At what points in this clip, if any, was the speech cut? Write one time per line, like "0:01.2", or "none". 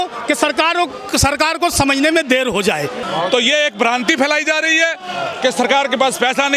0:03.0